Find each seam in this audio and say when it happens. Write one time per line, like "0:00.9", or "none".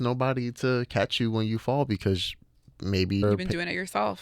0:03.2